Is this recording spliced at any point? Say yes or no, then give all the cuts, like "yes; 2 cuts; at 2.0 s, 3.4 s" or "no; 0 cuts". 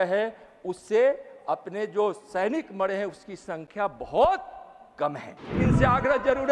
yes; 1 cut; at 5.6 s